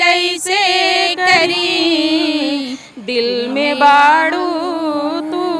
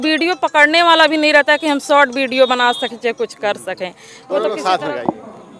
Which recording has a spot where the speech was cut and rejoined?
second; 1 cut; at 4.4 s

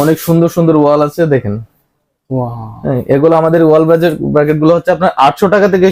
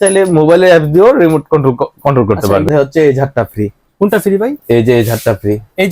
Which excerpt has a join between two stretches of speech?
second; 1 cut; at 2.7 s

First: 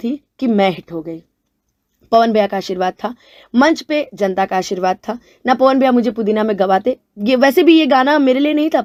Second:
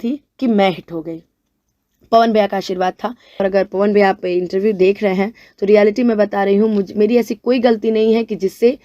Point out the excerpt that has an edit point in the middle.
second; 1 cut; at 3.4 s

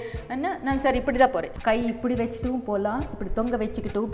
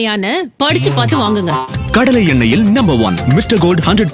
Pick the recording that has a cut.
first; 1 cut; at 1.5 s

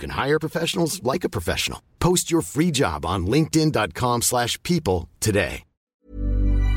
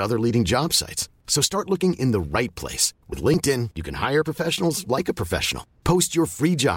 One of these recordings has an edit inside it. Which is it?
first; 1 cut; at 5.9 s

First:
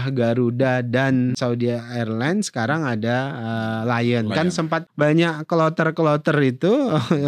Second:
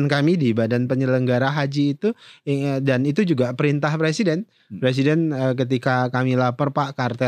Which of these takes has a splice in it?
first; 2 cuts; at 1.4 s, 4.9 s

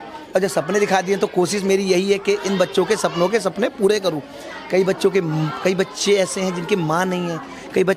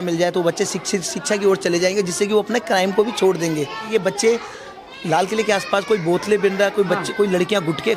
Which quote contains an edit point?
second; 1 cut; at 3.8 s

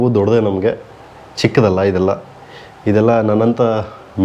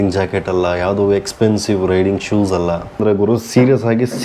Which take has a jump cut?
second; 1 cut; at 3.0 s

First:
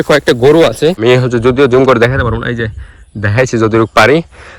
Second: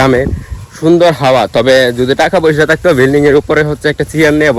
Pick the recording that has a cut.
first; 1 cut; at 1.0 s

